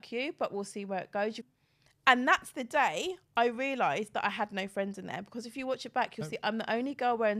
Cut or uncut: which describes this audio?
cut